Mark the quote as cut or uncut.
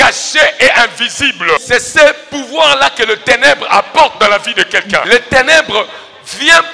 cut